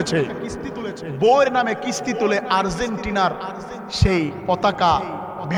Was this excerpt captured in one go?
yes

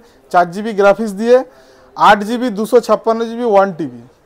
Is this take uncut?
yes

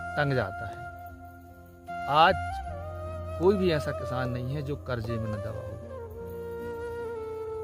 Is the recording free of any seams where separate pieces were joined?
yes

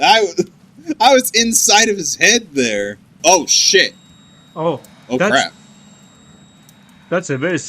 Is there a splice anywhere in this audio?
yes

